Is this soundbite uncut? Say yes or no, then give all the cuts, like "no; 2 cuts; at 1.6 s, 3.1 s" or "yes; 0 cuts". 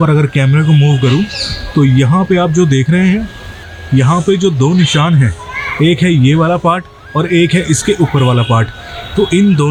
yes; 0 cuts